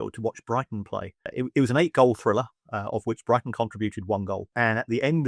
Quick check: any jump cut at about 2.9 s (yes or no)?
no